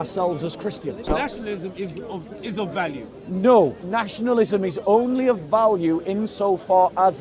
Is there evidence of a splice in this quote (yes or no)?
yes